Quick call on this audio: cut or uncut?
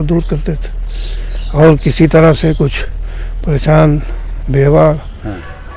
uncut